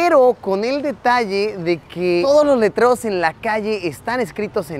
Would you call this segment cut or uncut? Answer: uncut